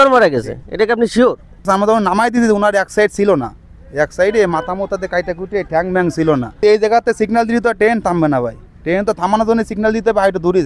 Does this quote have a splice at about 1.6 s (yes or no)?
yes